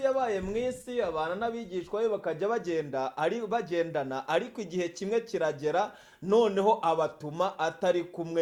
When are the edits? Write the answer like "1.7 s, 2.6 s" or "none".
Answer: none